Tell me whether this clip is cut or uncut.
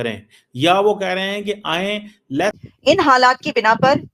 cut